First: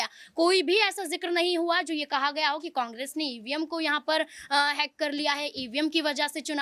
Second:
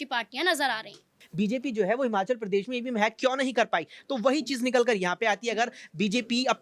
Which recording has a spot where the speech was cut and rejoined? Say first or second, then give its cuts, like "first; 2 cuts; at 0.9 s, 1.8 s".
second; 1 cut; at 1.2 s